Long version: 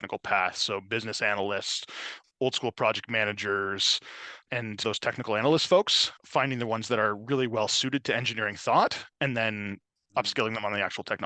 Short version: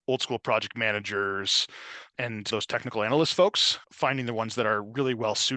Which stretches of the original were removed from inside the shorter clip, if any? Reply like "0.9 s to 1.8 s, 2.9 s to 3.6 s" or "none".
none